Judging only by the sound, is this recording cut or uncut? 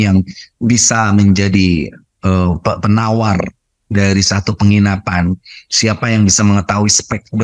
uncut